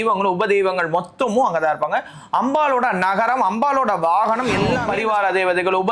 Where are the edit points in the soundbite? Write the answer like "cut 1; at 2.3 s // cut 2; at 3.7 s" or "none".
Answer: cut 1; at 4.8 s